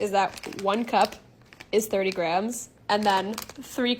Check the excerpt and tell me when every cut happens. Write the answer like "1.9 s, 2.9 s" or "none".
none